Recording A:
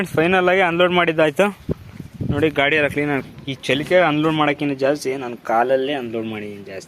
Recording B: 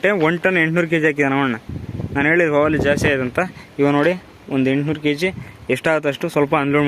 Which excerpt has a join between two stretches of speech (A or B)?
A